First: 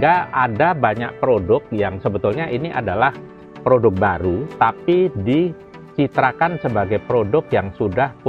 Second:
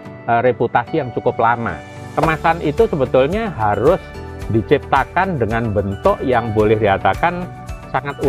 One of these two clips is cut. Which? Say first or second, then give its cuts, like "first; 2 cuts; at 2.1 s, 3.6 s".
second; 1 cut; at 2.0 s